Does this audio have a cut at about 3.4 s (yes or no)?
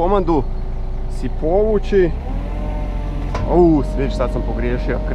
no